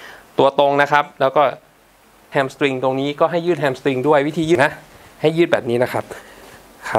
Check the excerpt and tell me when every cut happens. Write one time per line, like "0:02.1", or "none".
0:02.2
0:04.6